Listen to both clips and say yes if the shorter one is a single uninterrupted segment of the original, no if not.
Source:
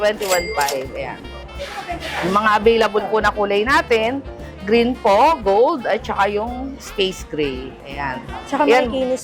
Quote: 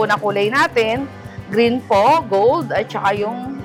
yes